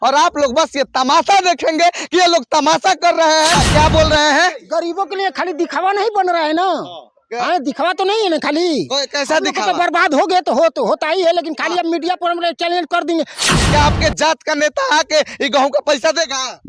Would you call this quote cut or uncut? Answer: cut